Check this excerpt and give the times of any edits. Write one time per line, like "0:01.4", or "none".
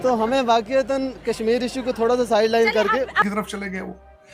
0:03.2